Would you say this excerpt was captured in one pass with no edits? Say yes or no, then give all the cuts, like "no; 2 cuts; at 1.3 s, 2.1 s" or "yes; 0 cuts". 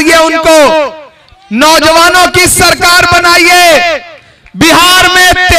yes; 0 cuts